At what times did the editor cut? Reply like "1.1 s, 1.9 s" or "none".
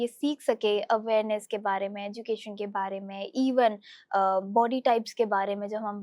none